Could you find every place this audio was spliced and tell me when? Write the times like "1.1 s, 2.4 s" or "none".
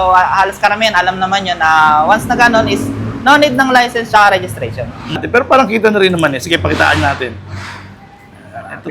5.2 s